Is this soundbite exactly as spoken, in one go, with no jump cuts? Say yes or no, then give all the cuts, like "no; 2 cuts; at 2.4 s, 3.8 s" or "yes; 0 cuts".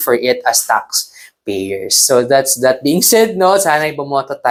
yes; 0 cuts